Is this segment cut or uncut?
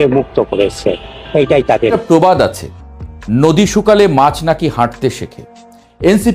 cut